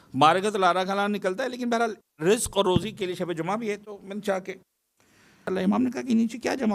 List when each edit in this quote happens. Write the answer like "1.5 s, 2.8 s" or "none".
5.5 s